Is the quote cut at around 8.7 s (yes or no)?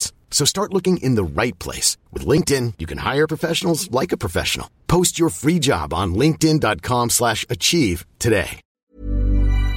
yes